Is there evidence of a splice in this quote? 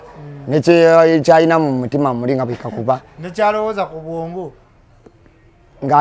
no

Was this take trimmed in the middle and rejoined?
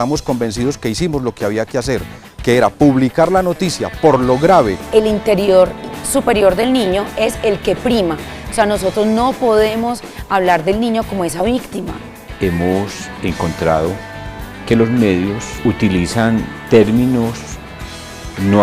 yes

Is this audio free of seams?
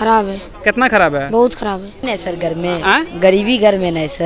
no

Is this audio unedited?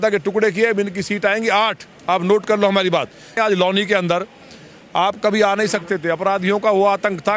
no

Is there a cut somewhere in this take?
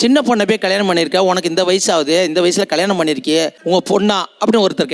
no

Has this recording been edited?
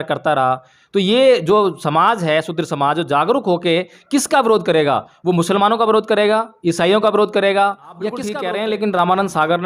yes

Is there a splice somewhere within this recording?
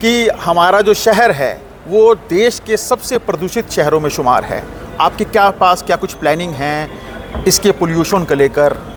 no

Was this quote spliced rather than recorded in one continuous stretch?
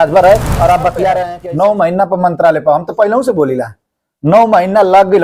yes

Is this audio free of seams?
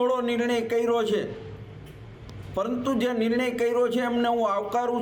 yes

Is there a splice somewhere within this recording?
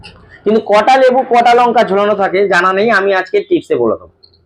no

